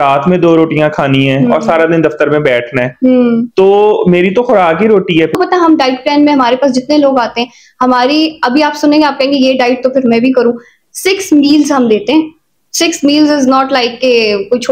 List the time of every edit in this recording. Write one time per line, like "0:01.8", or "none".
0:05.3